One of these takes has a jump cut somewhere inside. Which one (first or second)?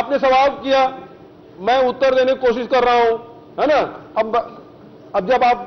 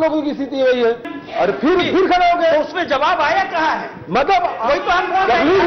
second